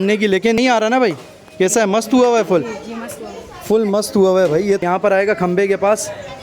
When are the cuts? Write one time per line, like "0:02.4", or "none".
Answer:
0:04.8